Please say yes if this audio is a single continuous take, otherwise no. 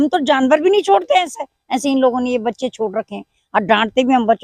yes